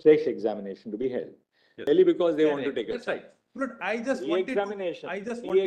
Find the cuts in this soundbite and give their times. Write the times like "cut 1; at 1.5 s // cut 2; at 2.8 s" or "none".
cut 1; at 1.8 s